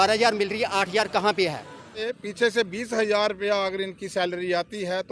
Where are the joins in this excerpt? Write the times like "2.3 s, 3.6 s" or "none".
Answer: 2.2 s